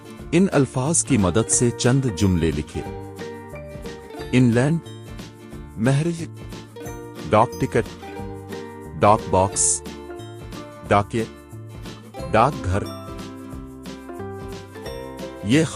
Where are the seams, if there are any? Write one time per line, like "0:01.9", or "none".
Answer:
0:12.8
0:14.8